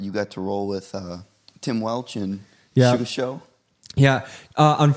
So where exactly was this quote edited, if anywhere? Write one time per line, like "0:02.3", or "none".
none